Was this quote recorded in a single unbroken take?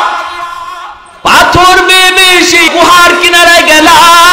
no; 1 cut; at 2.7 s

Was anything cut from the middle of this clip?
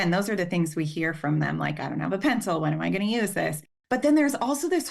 yes; 1 cut; at 3.7 s

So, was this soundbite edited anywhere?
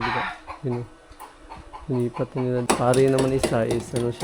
yes; 1 cut; at 2.6 s

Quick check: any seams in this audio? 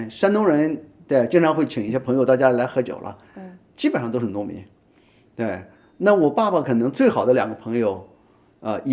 no; 0 cuts

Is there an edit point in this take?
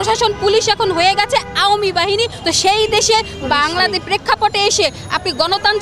no; 0 cuts

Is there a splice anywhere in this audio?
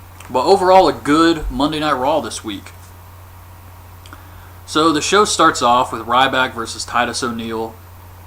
yes; 1 cut; at 7.2 s

